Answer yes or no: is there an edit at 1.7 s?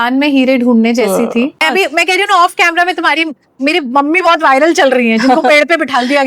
yes